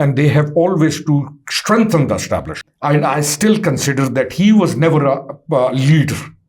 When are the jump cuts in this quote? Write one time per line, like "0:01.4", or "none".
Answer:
0:02.5